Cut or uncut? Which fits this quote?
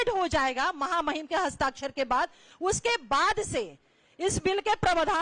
uncut